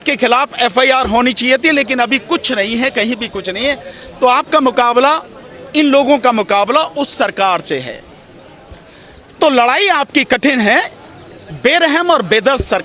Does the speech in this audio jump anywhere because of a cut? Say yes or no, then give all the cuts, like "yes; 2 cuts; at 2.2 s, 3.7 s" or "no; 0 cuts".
no; 0 cuts